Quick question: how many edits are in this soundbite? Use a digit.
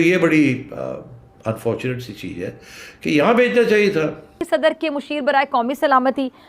1